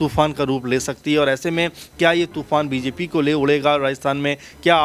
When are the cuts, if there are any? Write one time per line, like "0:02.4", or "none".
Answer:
none

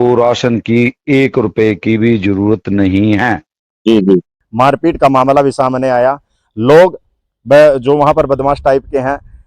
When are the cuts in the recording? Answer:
0:04.4

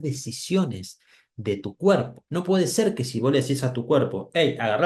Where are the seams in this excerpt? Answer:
0:02.2

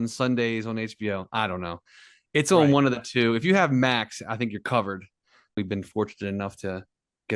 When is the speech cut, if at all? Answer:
0:05.6

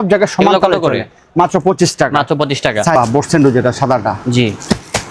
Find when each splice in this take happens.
0:03.0

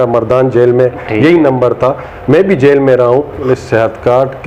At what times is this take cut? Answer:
0:03.4

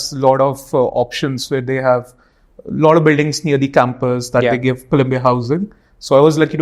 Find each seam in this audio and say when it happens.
none

